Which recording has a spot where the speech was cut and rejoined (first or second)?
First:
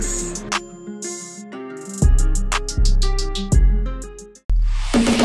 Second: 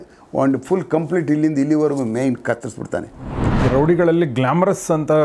second